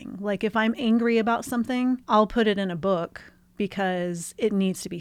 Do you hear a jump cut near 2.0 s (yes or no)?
yes